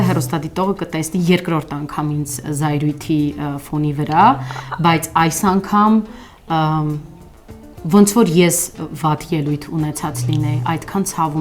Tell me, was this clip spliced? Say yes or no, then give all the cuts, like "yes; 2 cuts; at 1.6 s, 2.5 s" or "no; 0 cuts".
no; 0 cuts